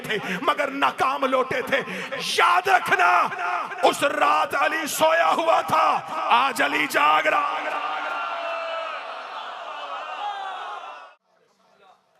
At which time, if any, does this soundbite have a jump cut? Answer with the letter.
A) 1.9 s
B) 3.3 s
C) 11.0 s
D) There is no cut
C